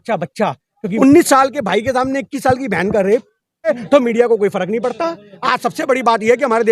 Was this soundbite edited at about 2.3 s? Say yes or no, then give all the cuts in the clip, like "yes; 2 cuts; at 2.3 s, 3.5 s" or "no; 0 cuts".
no; 2 cuts; at 0.9 s, 3.7 s